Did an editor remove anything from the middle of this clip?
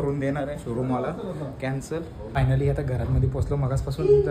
yes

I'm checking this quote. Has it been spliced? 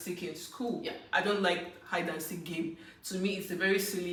no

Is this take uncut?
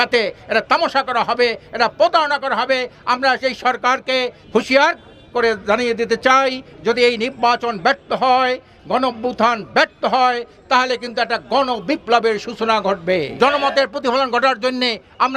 no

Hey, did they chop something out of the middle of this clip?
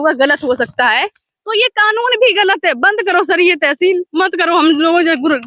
no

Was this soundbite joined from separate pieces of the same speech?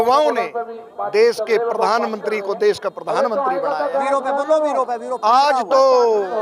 no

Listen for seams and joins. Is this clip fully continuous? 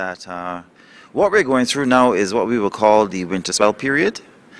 no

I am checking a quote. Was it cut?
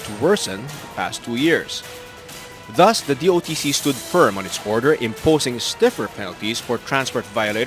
no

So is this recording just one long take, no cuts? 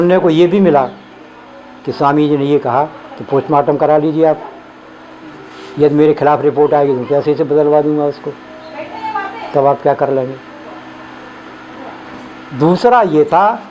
yes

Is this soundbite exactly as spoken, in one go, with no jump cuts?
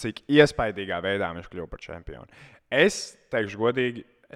yes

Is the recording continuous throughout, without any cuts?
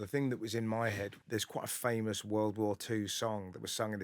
no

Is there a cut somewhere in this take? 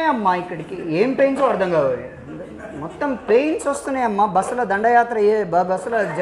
no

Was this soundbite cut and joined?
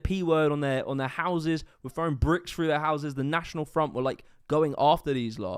no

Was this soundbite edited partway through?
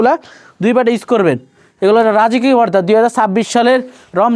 no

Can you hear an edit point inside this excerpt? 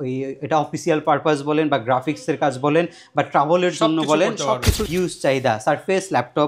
yes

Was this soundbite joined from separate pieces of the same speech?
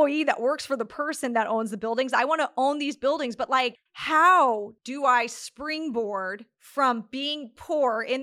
no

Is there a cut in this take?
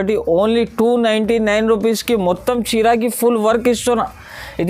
no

